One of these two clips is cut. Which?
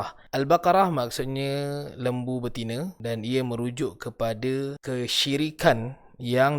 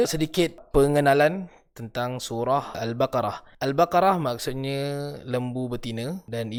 first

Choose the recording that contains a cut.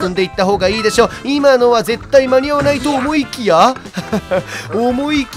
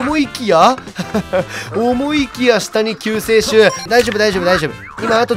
second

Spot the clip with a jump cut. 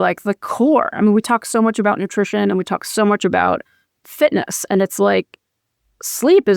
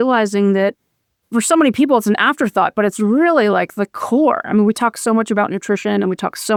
first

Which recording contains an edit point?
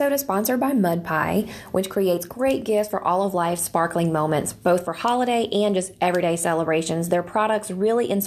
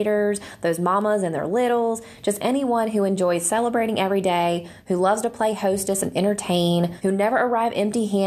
second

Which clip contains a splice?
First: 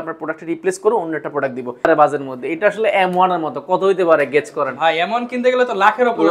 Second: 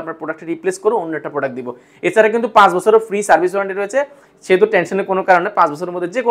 first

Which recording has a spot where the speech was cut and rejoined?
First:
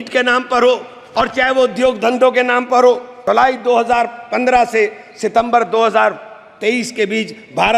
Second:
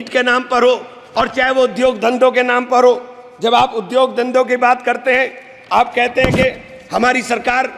first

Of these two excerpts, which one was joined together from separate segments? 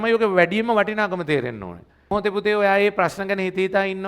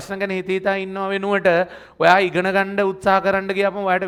first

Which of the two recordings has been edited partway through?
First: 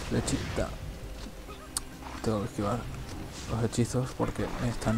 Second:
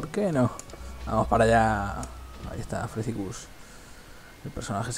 first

